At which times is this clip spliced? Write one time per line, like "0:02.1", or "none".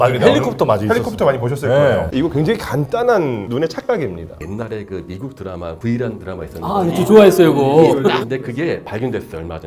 0:04.4
0:08.2